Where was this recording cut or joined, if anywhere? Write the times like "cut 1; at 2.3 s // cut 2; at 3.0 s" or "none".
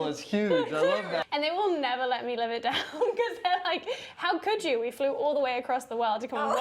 cut 1; at 1.2 s